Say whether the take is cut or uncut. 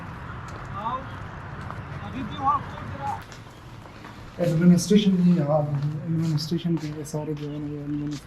cut